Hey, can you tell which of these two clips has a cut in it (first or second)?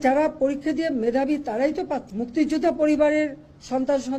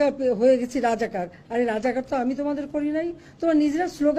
first